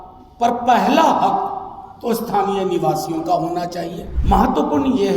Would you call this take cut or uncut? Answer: cut